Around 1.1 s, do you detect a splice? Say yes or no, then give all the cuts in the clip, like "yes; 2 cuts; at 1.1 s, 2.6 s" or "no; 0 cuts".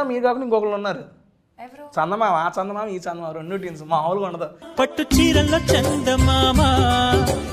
no; 0 cuts